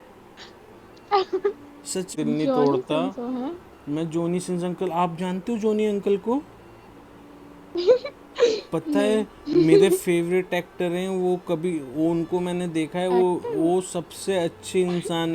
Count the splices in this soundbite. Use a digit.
1